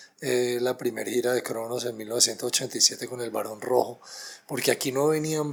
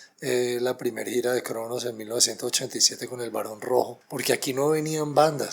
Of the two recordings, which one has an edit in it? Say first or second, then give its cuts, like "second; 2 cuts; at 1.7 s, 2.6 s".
second; 1 cut; at 4.1 s